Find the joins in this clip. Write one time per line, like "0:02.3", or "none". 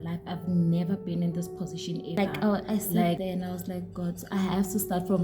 0:02.2